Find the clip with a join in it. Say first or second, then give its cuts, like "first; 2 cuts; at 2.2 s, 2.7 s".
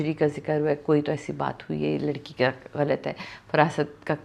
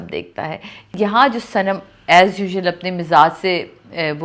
second; 1 cut; at 0.9 s